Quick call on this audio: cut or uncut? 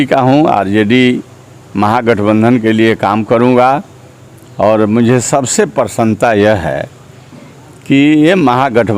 uncut